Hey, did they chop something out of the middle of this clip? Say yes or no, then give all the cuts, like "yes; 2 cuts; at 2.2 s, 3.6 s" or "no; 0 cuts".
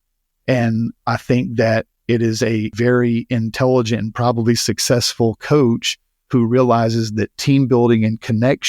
yes; 1 cut; at 2.7 s